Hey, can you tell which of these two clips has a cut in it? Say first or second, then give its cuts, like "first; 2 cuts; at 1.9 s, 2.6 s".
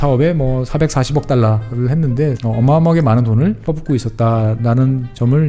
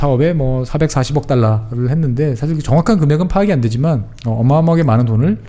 first; 2 cuts; at 2.4 s, 3.6 s